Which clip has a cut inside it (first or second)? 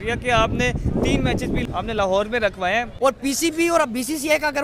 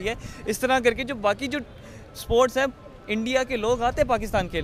first